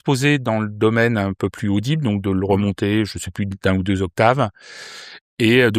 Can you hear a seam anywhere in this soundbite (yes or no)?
no